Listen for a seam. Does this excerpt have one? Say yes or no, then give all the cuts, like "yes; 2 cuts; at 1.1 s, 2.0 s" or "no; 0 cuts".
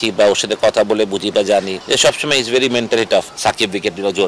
yes; 2 cuts; at 1.8 s, 3.3 s